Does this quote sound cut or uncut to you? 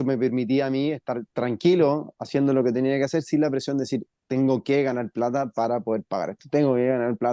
uncut